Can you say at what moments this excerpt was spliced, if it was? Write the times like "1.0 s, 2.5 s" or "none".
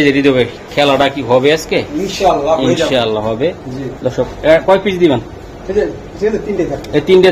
none